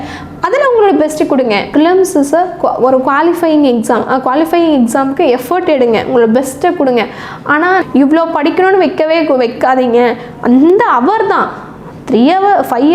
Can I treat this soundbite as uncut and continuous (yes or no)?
no